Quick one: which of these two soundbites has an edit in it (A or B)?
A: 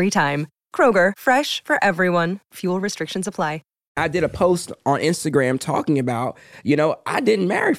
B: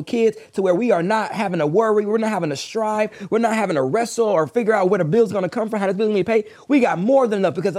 A